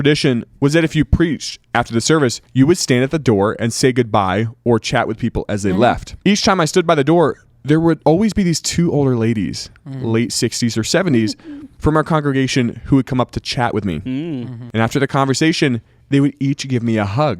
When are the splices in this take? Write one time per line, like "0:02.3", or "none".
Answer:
0:02.4
0:06.1
0:08.0